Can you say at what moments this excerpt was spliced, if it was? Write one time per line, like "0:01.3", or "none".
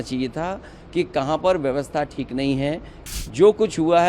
0:02.9